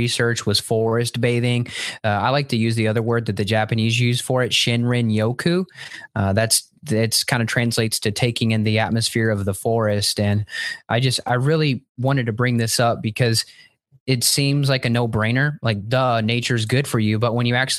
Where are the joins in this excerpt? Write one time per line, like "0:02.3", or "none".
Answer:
none